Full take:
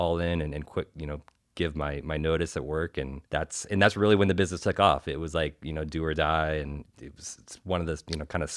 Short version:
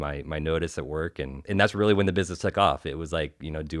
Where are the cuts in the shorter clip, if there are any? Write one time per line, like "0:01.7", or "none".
0:01.4